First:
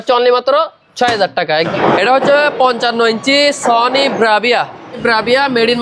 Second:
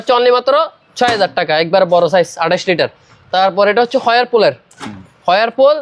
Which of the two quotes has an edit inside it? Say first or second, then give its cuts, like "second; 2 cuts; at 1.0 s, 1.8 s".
first; 2 cuts; at 1.7 s, 5.0 s